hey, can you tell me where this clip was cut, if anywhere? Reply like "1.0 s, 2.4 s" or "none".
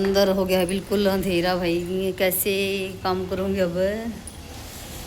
none